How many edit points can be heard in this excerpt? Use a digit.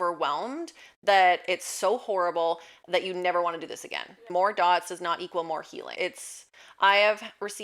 2